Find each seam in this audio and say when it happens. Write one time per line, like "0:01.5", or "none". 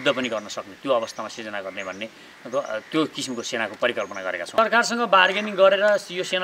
0:04.5